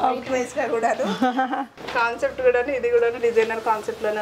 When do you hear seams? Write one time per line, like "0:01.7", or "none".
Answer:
0:01.8